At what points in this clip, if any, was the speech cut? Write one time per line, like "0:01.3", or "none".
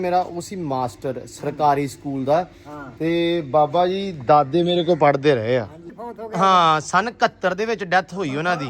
0:05.8